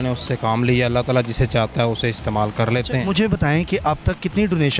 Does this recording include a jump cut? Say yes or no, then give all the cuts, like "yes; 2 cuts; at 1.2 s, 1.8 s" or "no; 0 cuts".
no; 0 cuts